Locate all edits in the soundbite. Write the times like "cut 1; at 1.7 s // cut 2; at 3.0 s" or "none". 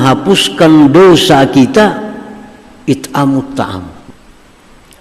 cut 1; at 3.9 s